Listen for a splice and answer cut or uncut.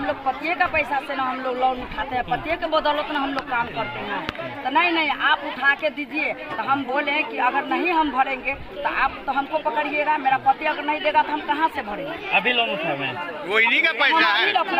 uncut